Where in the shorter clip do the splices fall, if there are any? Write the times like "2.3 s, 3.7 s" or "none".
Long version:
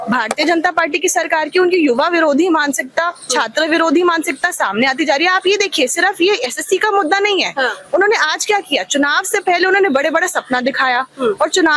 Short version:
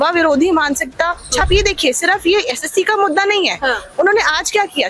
1.4 s